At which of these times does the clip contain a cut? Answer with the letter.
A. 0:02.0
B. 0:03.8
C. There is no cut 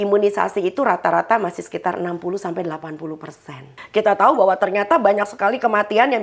B